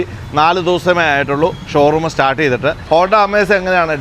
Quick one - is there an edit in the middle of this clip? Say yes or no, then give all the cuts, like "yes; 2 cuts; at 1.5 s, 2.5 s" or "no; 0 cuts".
yes; 1 cut; at 2.8 s